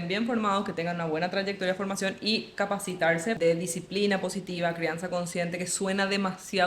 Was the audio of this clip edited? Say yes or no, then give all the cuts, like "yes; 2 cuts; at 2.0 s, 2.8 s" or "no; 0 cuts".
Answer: yes; 1 cut; at 3.4 s